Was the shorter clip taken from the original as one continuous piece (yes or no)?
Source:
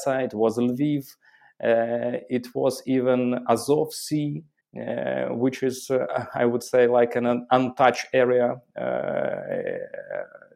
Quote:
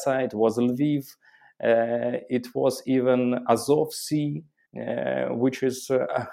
yes